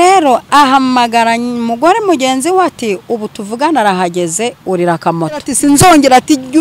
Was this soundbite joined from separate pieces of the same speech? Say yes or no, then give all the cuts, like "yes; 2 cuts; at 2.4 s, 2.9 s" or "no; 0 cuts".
yes; 1 cut; at 5.5 s